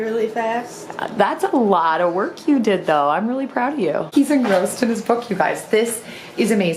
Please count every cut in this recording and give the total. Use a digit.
1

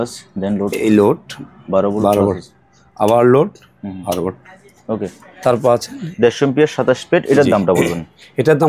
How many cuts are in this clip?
0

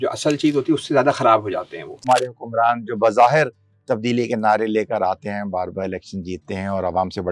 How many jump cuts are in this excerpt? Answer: 1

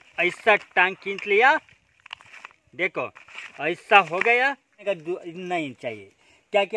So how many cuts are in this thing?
1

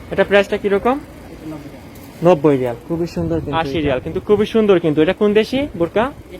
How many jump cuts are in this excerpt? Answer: 1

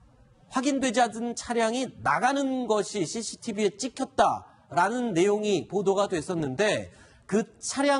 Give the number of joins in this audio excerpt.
1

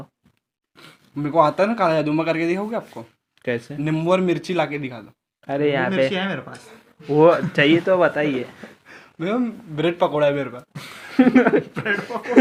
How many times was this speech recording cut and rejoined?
0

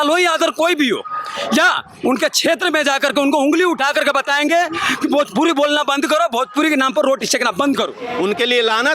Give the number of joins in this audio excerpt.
1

